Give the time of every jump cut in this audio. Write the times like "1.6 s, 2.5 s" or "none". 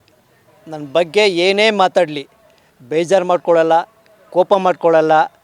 none

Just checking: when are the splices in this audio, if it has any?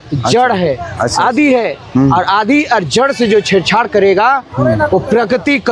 none

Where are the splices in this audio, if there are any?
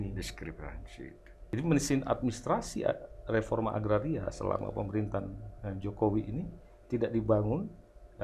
1.5 s

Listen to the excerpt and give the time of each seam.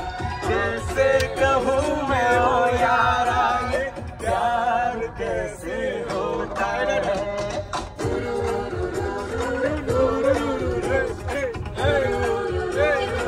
none

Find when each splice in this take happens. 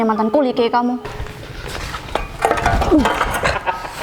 1.1 s

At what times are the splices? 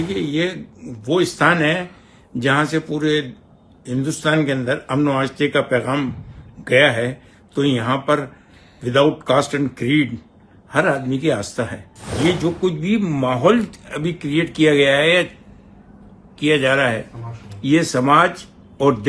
12.2 s

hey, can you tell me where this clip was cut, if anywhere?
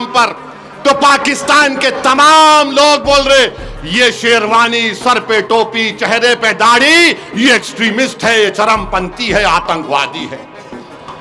none

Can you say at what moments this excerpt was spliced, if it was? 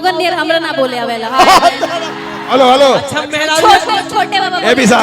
3.1 s

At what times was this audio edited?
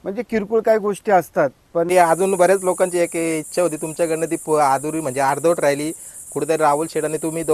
1.9 s

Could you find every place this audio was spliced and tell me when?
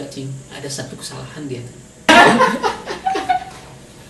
2.1 s

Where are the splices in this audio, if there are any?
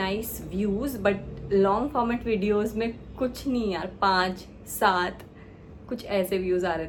none

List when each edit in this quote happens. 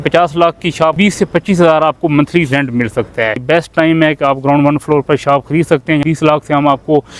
0.9 s, 3.4 s, 6.0 s

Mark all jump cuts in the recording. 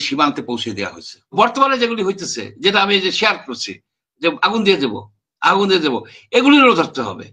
1.3 s

